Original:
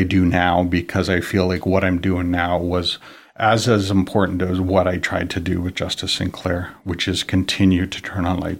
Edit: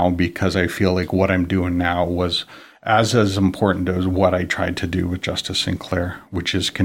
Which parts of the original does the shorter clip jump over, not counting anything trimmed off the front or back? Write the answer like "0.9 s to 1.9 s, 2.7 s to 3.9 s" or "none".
none